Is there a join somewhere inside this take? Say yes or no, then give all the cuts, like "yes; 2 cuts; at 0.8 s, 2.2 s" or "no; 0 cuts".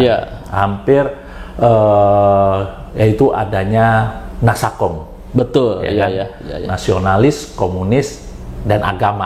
no; 0 cuts